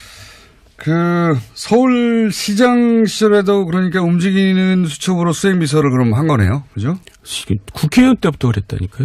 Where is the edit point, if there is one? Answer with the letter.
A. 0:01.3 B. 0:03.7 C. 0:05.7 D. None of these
A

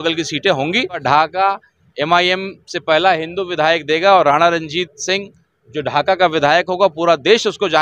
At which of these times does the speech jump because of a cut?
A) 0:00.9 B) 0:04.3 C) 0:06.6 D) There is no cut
A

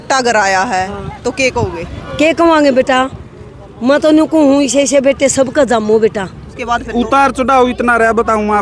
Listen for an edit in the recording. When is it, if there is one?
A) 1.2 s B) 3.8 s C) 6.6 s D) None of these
C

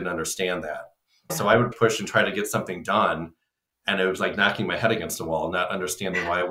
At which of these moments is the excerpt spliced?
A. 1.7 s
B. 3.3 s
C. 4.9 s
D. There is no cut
A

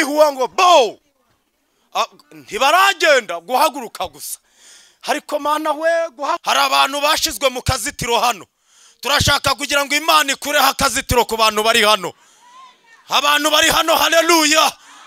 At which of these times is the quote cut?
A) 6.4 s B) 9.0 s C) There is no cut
A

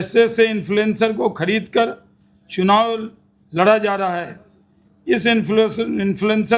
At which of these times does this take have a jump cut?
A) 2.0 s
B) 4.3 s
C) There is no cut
C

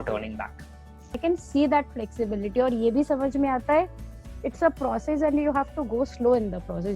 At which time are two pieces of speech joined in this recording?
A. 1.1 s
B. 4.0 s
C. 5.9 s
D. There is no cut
A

